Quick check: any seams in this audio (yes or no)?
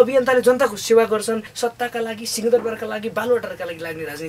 yes